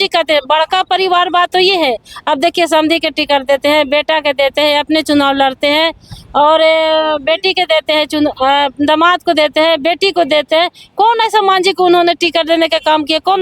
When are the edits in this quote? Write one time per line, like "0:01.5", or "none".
none